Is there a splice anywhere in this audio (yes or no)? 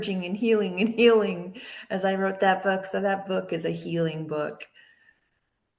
no